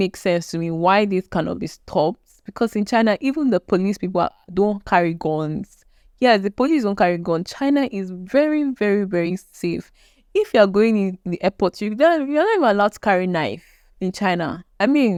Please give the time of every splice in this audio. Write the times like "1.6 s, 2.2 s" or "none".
none